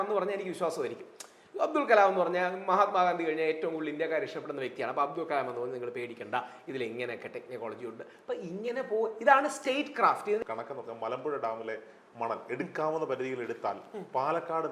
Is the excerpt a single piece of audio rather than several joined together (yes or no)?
no